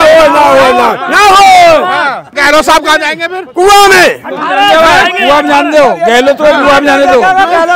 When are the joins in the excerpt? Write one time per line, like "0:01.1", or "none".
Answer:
0:02.3

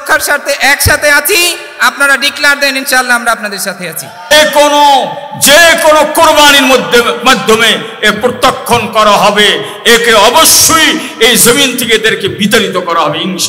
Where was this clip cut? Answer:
0:04.3

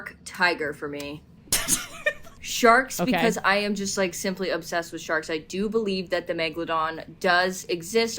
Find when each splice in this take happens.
0:01.3
0:02.4

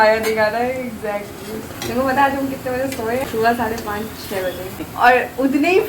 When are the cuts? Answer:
0:01.8
0:03.2
0:04.8

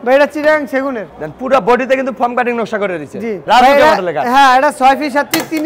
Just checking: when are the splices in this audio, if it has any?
0:01.0
0:03.4

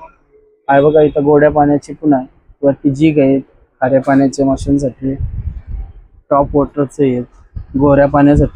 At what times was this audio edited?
none

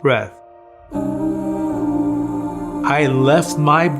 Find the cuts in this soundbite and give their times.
0:02.9

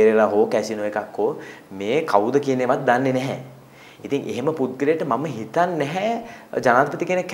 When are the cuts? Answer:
none

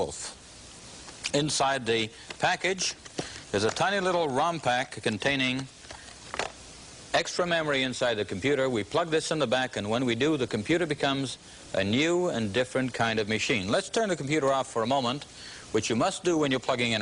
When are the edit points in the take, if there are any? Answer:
0:08.3

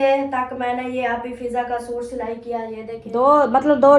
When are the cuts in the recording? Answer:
0:03.0

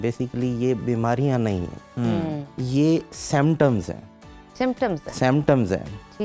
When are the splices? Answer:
none

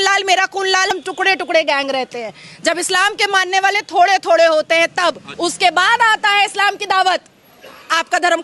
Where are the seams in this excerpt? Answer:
0:00.9
0:05.3

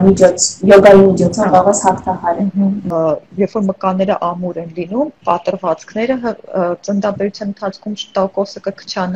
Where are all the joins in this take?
0:02.9

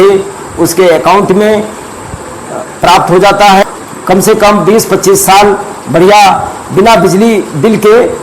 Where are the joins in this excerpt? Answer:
0:03.6

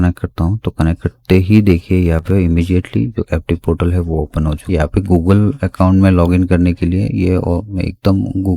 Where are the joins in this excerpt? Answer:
none

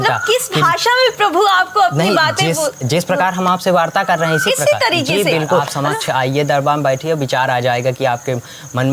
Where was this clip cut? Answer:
0:05.7

